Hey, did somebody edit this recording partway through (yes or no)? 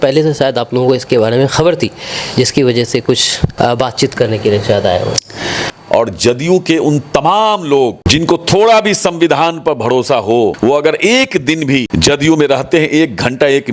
yes